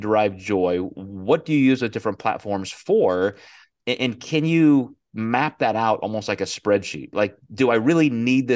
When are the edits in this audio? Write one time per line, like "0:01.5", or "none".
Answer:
0:07.1